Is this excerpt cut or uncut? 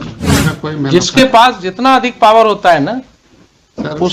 uncut